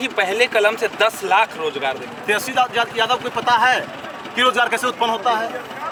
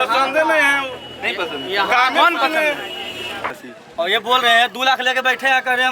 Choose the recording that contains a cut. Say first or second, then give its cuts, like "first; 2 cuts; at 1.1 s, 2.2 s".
second; 1 cut; at 3.6 s